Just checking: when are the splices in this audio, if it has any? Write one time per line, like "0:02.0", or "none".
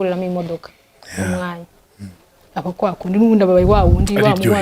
0:02.4